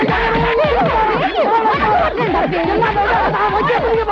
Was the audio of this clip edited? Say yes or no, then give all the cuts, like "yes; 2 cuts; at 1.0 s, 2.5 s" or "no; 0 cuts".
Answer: yes; 1 cut; at 2.6 s